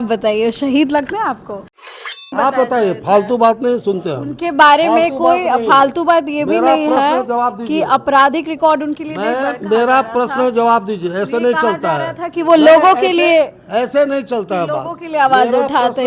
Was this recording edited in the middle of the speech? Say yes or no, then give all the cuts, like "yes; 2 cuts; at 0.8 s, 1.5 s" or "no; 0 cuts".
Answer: yes; 1 cut; at 2.3 s